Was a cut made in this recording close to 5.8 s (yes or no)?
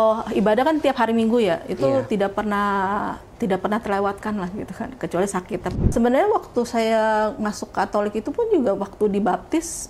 yes